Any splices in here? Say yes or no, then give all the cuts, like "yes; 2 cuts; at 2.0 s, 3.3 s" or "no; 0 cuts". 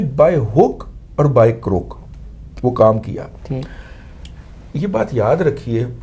no; 0 cuts